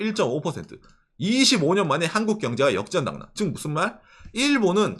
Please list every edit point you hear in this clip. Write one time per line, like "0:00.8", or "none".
none